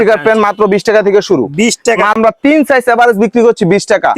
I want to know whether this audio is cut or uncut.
cut